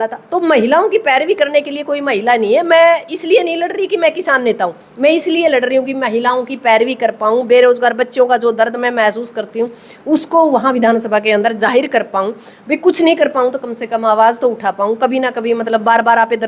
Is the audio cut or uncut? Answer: uncut